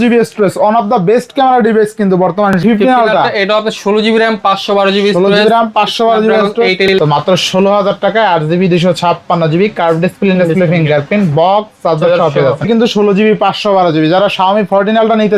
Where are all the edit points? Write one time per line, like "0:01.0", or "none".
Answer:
0:02.6
0:06.9
0:12.7